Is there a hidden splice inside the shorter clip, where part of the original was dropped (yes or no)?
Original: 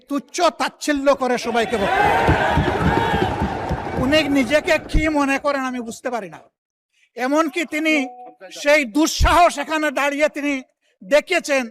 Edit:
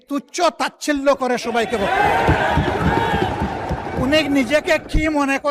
no